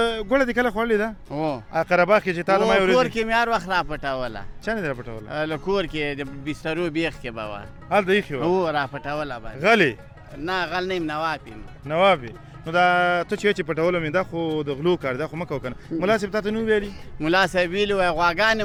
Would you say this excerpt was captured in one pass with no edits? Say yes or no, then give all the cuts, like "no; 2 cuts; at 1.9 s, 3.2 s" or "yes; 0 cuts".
yes; 0 cuts